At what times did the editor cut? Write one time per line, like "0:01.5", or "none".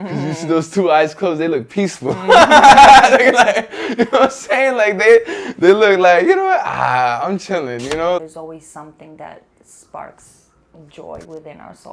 0:08.2